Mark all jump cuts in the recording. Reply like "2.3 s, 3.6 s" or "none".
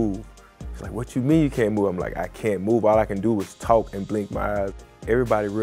4.7 s